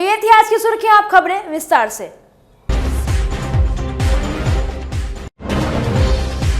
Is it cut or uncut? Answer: cut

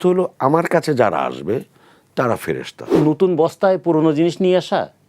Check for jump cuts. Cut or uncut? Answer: cut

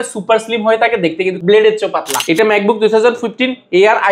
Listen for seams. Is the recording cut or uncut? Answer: cut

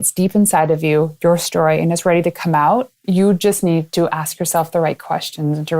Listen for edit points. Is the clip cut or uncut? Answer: cut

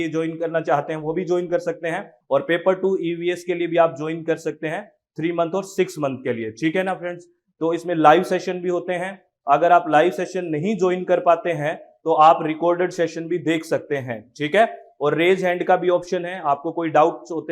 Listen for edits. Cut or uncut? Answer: cut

